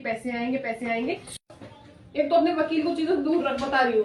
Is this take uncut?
no; 1 cut; at 1.3 s

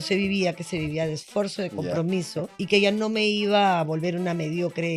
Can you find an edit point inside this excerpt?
yes; 1 cut; at 2.6 s

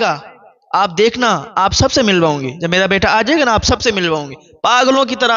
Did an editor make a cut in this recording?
no; 0 cuts

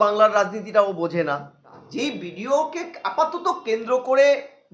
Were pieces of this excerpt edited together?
yes; 1 cut; at 1.8 s

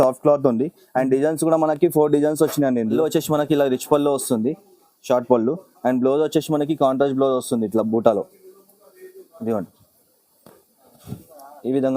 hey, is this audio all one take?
no; 1 cut; at 3.0 s

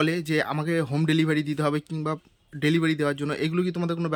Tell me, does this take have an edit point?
no; 0 cuts

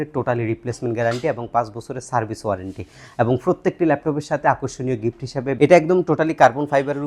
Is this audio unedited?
no; 1 cut; at 5.6 s

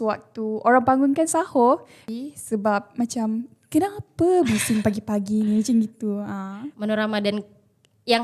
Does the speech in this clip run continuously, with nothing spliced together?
no; 2 cuts; at 1.9 s, 6.6 s

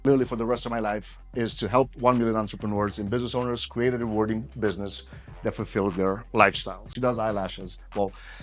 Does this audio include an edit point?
yes; 1 cut; at 6.9 s

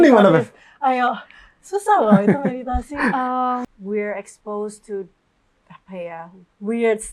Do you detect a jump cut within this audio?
yes; 1 cut; at 3.6 s

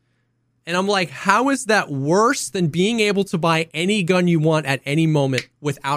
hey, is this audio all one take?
yes; 0 cuts

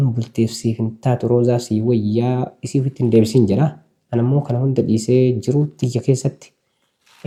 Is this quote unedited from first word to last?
yes; 0 cuts

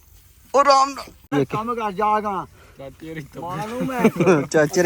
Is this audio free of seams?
no; 1 cut; at 1.3 s

